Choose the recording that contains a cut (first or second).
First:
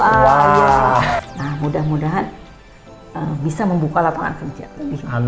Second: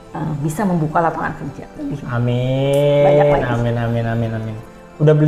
first